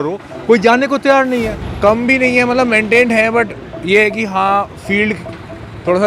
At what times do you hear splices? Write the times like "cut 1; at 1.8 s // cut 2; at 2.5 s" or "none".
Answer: cut 1; at 1.6 s

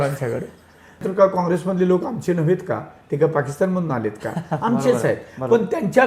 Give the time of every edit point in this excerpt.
cut 1; at 1.1 s

